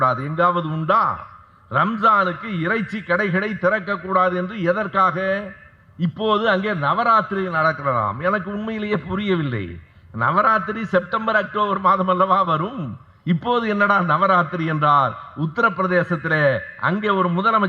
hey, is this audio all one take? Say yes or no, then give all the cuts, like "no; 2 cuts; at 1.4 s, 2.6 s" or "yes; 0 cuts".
yes; 0 cuts